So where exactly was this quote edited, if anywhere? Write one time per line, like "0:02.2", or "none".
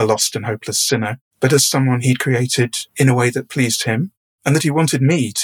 0:01.2
0:02.8